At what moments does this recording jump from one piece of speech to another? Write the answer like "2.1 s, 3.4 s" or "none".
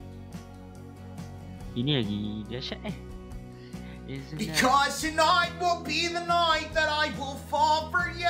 4.4 s

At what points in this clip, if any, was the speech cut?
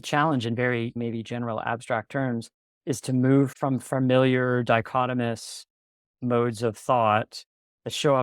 0.9 s, 3.5 s

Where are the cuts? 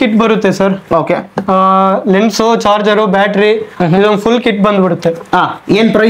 none

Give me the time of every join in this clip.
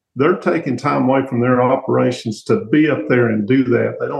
none

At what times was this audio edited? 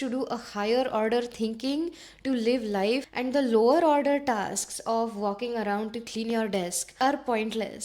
3.1 s, 7.0 s

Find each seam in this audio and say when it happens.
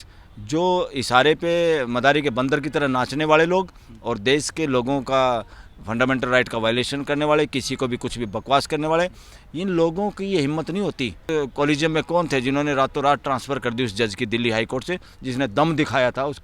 11.2 s

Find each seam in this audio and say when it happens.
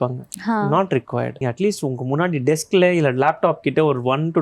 1.4 s

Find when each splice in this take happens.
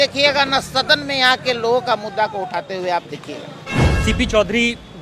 3.7 s

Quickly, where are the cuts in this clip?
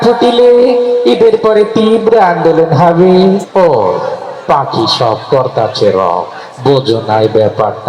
3.4 s

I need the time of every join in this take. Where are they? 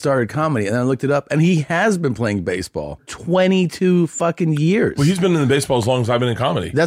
3.1 s

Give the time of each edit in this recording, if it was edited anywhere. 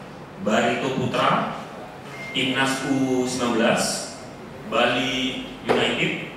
none

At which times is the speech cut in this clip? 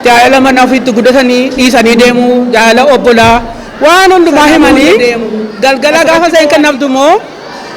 5.0 s

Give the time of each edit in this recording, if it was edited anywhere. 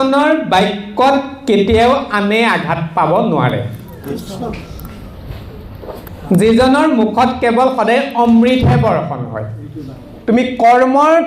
10.1 s

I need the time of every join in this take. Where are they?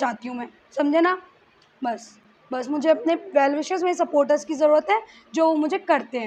none

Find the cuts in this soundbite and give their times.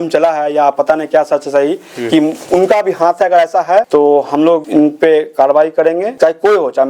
3.9 s, 4.7 s, 6.1 s

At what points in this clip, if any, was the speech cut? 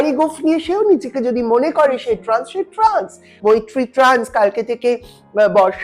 3.3 s

